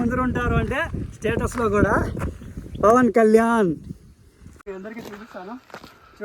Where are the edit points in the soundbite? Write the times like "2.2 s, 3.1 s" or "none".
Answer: 4.5 s